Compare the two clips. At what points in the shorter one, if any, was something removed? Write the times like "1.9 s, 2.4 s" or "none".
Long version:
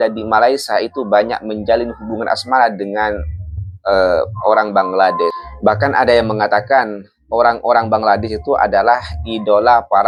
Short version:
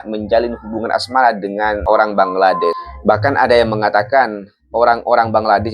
1.8 s